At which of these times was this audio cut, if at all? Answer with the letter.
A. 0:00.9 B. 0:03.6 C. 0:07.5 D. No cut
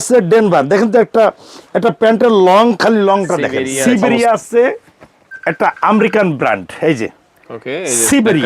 B